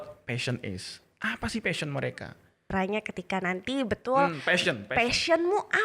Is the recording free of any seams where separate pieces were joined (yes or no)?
no